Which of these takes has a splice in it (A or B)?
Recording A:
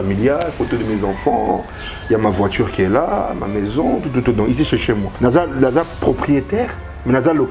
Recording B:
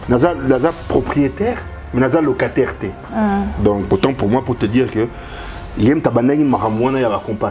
B